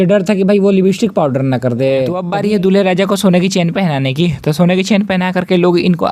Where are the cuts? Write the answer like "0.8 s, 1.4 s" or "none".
2.2 s